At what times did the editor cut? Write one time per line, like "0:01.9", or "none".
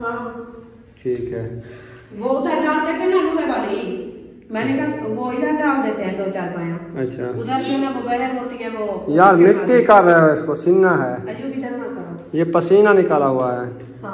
none